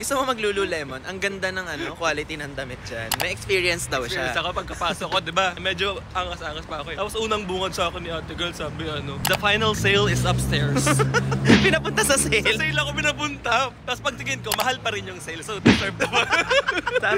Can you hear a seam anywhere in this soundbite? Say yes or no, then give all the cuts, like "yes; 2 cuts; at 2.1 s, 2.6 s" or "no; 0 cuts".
no; 0 cuts